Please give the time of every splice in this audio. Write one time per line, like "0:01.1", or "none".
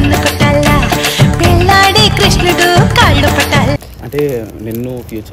0:03.9